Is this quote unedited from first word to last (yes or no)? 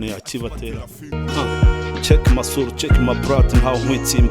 no